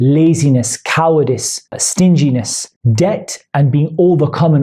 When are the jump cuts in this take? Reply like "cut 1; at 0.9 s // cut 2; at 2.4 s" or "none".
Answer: cut 1; at 1.7 s